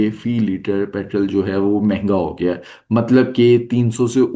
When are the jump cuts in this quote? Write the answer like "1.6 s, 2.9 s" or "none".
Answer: none